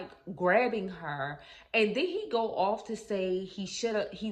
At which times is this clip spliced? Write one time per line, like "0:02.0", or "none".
none